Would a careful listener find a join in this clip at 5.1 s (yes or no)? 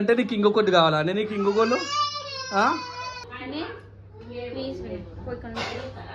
no